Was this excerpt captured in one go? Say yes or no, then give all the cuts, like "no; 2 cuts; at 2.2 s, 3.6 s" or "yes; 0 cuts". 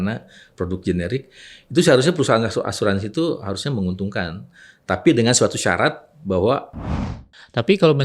no; 1 cut; at 7.1 s